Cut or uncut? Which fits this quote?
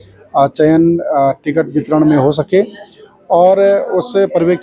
uncut